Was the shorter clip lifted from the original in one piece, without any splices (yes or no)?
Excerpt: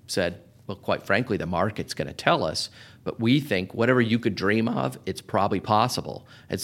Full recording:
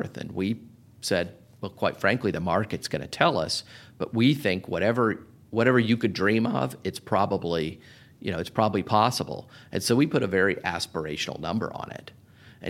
no